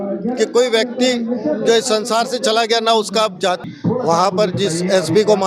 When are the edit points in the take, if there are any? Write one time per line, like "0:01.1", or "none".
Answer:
0:03.6